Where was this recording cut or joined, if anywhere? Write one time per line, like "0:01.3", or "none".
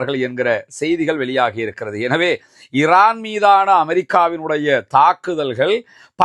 none